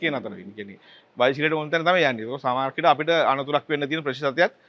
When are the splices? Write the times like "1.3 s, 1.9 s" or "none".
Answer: none